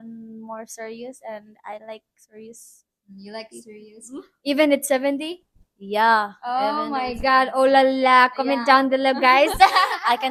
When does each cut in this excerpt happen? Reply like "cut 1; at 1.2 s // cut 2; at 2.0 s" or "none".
none